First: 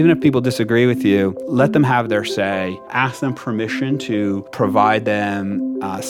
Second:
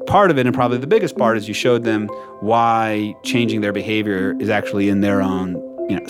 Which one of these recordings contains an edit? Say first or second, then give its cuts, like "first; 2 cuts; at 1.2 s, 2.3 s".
first; 3 cuts; at 1.4 s, 2.8 s, 4.5 s